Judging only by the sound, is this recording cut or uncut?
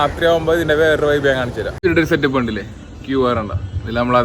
cut